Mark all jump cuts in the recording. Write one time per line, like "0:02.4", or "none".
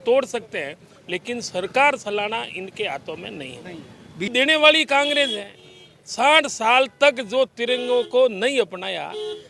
0:04.3